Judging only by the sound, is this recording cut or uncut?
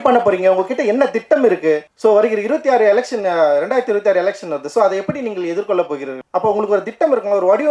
cut